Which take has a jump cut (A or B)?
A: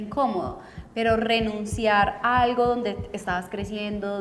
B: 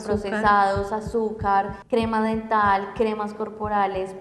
B